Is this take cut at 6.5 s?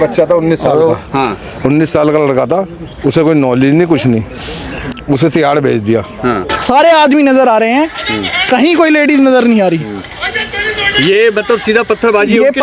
yes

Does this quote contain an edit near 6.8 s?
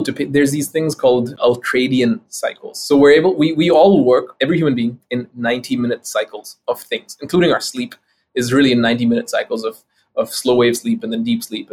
no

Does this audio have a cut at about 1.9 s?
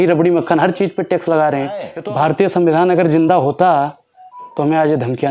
yes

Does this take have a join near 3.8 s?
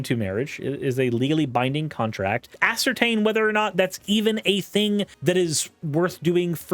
no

